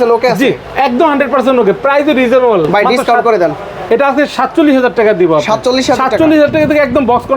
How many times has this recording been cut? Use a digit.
0